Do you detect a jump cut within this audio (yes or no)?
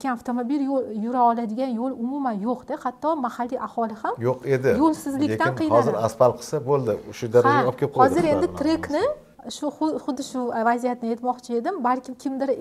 no